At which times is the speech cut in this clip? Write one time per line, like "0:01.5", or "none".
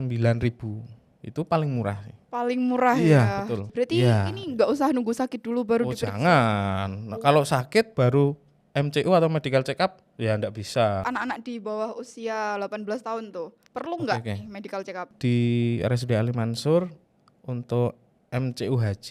0:03.7
0:11.1
0:15.1